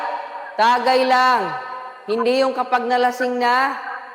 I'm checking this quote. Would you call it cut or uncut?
cut